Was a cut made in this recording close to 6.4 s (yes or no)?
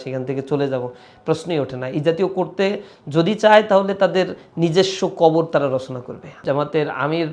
yes